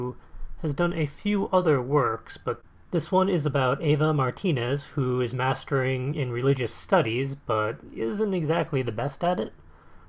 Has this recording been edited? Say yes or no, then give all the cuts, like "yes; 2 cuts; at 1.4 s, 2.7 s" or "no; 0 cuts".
yes; 1 cut; at 9.0 s